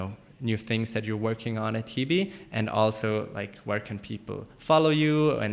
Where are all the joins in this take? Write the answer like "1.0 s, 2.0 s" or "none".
none